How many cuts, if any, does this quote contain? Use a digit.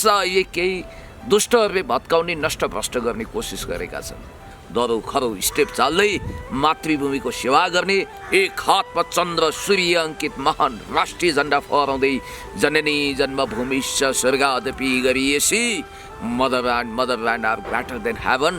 1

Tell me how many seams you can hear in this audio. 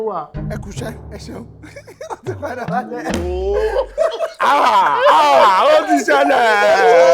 1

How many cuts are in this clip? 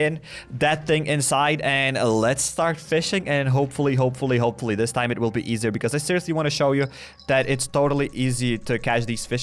0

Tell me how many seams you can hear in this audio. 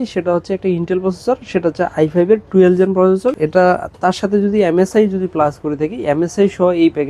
1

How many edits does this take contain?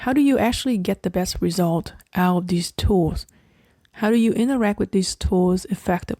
0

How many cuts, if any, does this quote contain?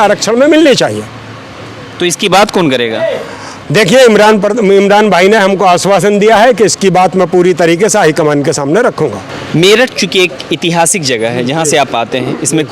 0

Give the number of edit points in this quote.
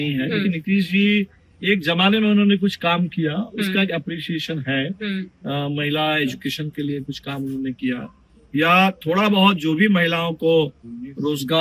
0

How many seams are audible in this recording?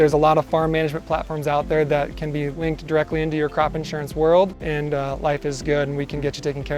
2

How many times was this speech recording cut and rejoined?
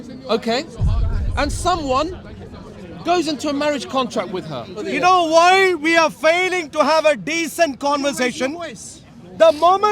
1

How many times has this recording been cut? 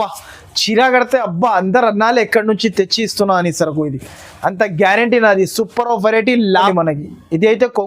1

